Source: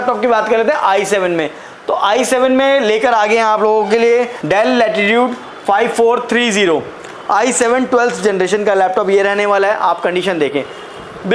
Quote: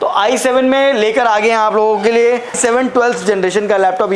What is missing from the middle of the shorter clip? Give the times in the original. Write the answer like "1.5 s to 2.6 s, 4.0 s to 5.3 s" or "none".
4.4 s to 7.5 s